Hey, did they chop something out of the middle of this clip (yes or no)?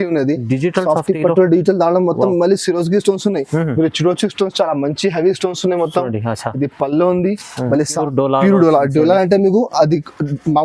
yes